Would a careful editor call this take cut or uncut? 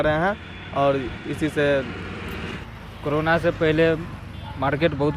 cut